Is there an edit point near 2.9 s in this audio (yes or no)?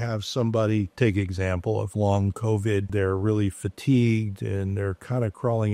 yes